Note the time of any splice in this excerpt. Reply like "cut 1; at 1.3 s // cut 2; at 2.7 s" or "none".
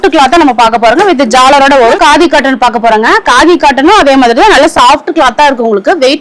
cut 1; at 2.0 s